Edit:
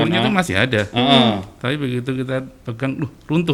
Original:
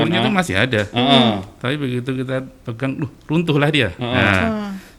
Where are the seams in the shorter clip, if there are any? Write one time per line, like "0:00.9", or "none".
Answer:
none